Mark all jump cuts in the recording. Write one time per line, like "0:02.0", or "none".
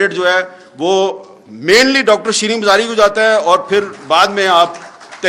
none